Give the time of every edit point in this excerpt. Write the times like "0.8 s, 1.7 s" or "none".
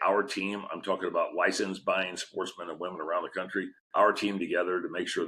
3.8 s